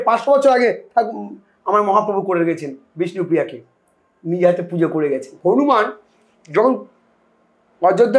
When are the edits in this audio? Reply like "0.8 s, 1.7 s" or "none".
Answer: 5.3 s